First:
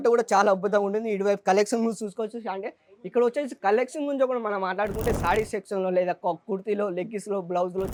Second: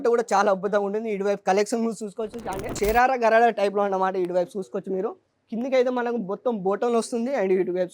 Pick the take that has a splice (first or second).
second